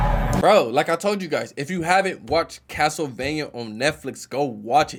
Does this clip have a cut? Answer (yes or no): no